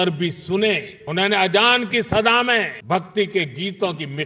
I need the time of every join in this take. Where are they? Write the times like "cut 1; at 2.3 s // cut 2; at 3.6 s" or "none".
cut 1; at 2.8 s